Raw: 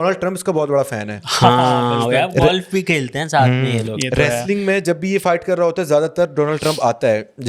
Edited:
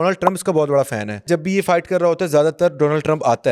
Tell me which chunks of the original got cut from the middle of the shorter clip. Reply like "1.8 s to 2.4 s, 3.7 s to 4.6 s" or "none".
1.2 s to 4.8 s